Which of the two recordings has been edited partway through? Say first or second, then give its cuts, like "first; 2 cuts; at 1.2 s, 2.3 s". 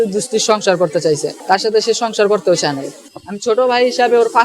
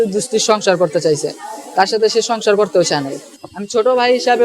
first; 1 cut; at 1.3 s